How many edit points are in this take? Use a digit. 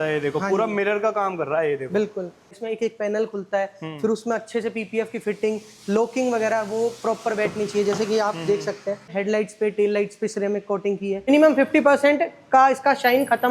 3